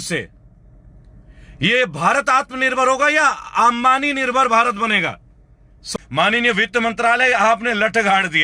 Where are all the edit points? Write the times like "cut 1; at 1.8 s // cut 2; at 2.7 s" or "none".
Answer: cut 1; at 5.8 s

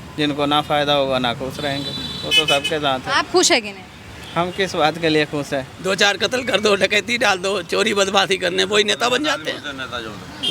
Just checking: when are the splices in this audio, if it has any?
cut 1; at 5.7 s

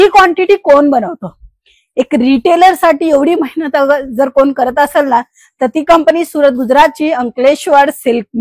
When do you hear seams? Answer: none

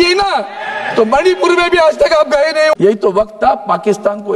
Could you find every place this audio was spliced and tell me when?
cut 1; at 2.7 s

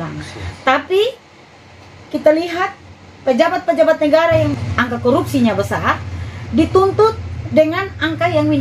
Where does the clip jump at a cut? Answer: cut 1; at 4.5 s

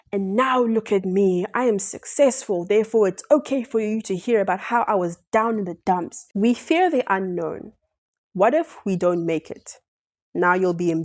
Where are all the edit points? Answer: cut 1; at 6.2 s

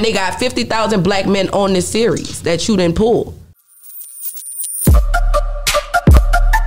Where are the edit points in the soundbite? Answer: cut 1; at 3.7 s

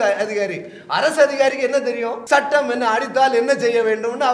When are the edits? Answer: cut 1; at 2.1 s

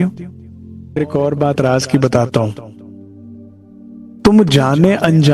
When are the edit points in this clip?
cut 1; at 1.0 s // cut 2; at 2.6 s // cut 3; at 4.1 s

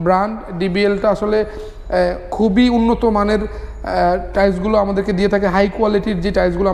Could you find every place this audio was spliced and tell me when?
none

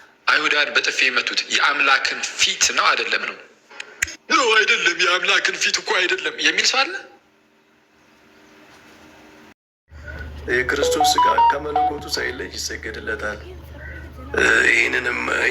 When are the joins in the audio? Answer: cut 1; at 9.6 s

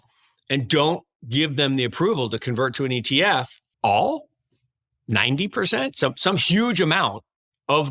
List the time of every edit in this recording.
cut 1; at 3.6 s

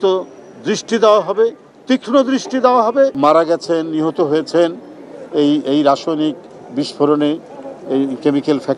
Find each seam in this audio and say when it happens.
cut 1; at 3.1 s

